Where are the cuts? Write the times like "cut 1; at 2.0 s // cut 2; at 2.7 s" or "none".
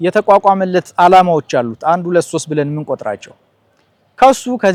none